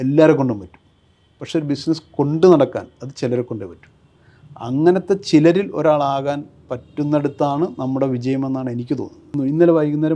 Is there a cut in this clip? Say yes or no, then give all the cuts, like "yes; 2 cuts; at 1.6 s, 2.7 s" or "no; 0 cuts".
yes; 1 cut; at 9.2 s